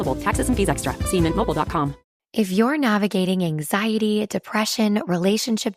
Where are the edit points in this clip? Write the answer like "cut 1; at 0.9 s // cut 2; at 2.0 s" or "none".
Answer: cut 1; at 2.1 s